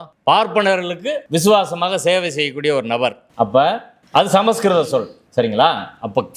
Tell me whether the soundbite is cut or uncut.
uncut